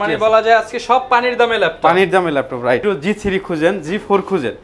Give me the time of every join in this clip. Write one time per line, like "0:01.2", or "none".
0:02.8